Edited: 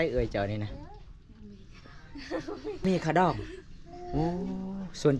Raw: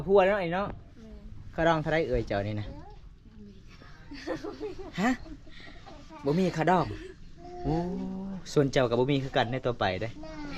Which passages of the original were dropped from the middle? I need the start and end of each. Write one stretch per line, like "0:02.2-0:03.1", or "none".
0:04.8-0:06.4